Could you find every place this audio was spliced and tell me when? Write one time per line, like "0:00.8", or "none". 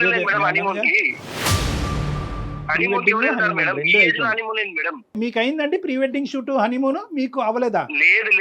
none